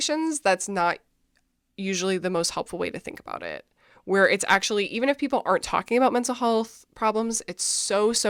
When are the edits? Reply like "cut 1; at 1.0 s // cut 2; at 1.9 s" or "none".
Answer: none